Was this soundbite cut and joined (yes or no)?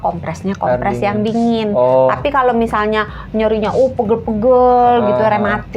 no